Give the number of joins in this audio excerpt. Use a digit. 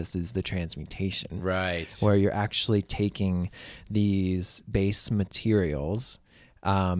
0